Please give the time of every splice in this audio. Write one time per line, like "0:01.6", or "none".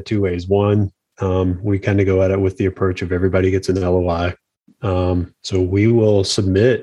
none

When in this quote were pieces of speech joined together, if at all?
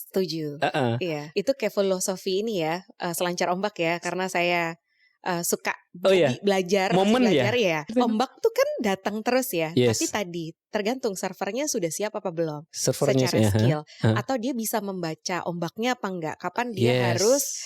0:01.3
0:07.9

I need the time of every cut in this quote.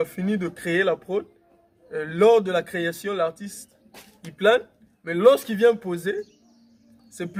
none

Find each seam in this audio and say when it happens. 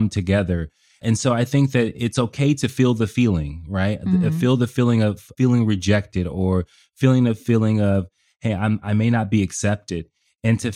0:00.9
0:05.3

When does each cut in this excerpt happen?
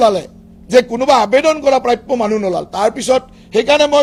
none

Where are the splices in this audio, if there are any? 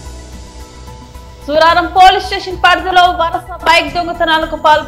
0:01.1

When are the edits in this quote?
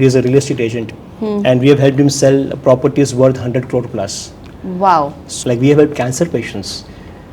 0:05.3

